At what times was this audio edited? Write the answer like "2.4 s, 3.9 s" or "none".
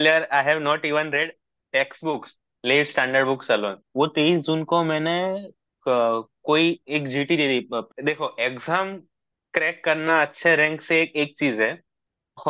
3.8 s, 7.9 s